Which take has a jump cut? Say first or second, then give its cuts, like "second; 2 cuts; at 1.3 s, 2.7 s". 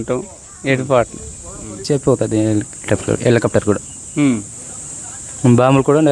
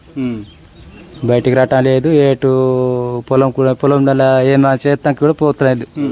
first; 1 cut; at 1.8 s